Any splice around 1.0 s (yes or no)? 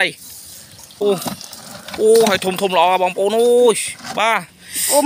yes